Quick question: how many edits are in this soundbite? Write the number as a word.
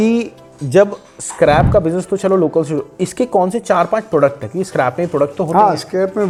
zero